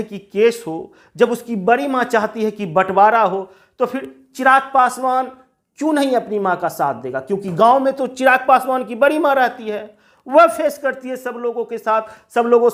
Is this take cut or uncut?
uncut